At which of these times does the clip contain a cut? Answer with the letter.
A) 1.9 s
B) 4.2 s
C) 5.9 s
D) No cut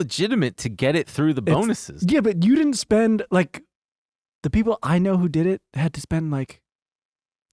A